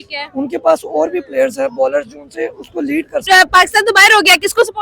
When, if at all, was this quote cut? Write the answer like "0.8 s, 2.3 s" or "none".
3.2 s